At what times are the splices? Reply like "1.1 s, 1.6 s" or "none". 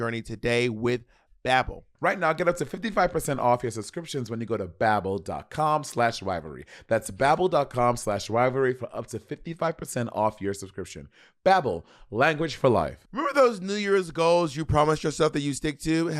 13.0 s